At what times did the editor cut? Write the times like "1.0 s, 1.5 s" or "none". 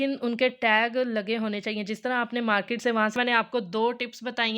3.2 s